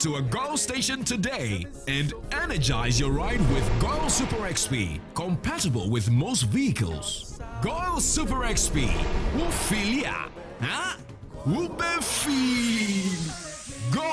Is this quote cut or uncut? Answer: cut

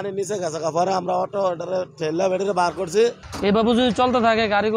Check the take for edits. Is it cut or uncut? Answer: cut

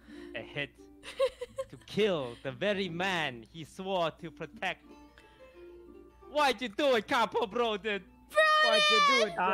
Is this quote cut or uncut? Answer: cut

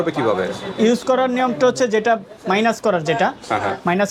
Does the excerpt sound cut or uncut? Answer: uncut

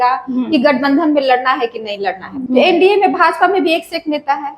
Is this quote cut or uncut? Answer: cut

